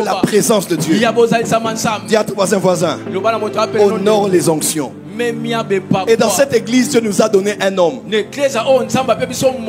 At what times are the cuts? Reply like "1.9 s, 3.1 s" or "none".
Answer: none

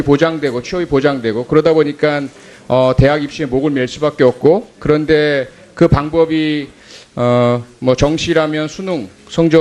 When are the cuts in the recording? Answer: none

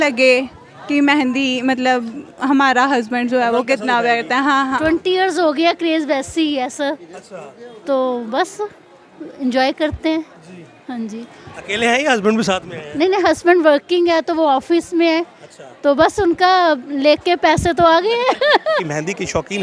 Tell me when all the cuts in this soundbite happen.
4.8 s, 18.9 s

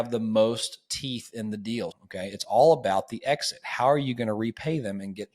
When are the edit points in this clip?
1.9 s

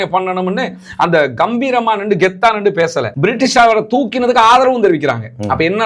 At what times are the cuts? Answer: 3.1 s

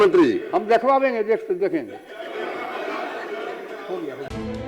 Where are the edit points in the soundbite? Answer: none

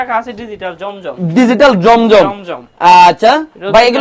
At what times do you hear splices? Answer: none

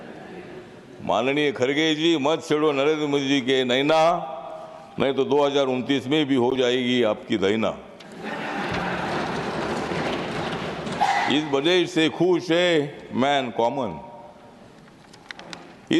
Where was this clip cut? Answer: none

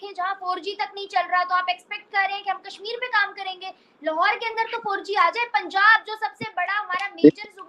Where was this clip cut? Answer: none

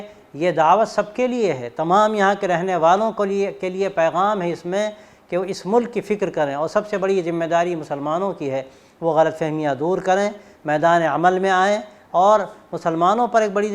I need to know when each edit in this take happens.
none

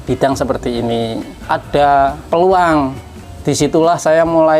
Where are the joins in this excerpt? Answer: 2.2 s

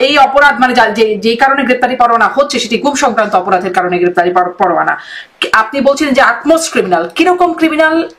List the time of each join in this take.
none

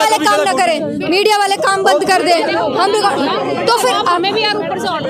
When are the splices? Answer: none

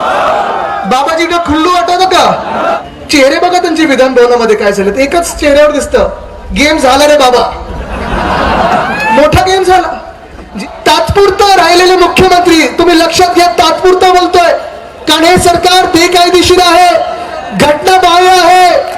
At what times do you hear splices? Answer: 2.7 s, 10.5 s

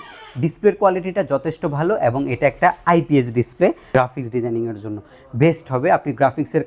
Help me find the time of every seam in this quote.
3.9 s

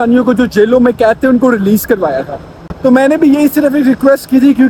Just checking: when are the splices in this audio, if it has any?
none

